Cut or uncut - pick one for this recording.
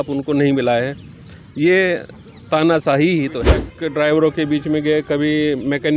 cut